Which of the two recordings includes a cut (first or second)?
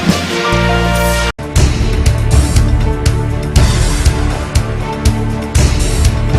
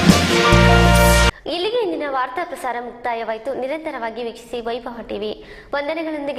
first